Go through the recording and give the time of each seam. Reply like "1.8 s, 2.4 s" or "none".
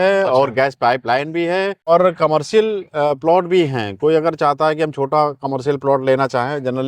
1.9 s